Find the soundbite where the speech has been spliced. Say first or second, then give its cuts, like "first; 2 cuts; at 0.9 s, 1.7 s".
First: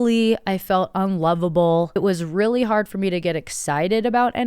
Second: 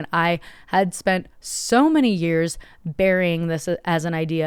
first; 1 cut; at 2.0 s